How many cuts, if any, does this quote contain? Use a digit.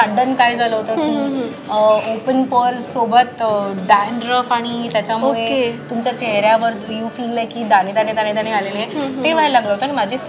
0